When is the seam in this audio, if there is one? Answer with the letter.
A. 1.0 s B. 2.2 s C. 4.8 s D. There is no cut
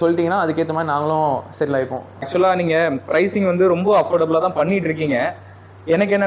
B